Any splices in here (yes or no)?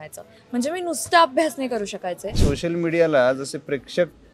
yes